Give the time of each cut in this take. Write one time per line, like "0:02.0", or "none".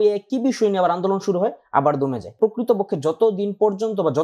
0:02.4